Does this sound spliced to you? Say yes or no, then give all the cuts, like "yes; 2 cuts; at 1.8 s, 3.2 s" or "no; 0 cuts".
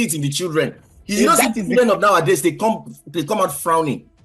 no; 0 cuts